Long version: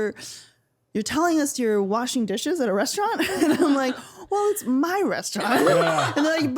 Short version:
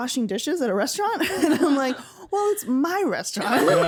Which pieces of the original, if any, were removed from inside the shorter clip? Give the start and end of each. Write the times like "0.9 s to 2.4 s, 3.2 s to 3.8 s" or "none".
none